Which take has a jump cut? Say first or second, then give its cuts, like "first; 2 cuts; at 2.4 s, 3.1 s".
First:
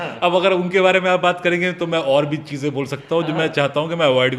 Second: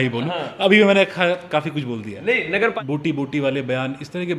second; 1 cut; at 2.7 s